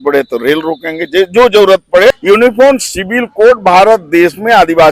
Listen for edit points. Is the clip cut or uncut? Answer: cut